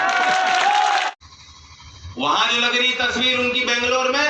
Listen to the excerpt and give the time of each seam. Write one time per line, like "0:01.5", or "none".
0:01.1